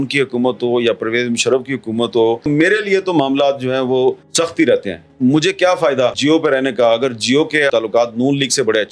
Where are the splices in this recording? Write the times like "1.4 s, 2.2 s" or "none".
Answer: 4.2 s, 6.2 s, 7.7 s